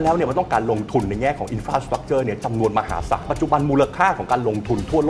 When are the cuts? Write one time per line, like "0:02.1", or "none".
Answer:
0:03.2